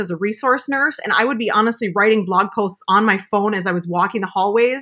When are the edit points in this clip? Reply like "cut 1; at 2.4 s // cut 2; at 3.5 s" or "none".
none